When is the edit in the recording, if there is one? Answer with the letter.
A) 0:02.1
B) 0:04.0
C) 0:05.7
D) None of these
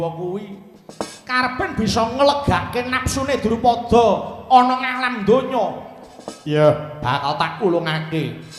D